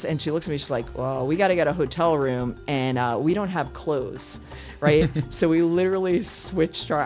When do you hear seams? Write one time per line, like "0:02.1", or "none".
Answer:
none